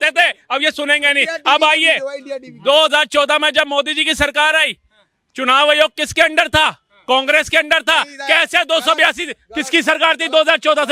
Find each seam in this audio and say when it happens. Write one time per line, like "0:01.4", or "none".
none